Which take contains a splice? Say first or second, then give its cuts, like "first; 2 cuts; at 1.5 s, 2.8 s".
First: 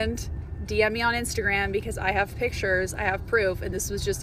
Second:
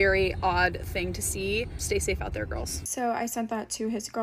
second; 2 cuts; at 1.8 s, 2.8 s